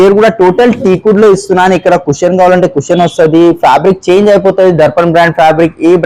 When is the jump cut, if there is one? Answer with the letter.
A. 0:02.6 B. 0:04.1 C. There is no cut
C